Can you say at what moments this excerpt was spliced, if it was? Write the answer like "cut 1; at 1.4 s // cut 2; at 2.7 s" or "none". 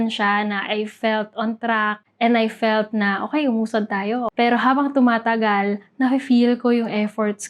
cut 1; at 4.3 s